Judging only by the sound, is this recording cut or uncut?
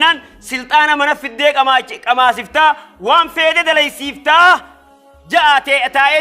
uncut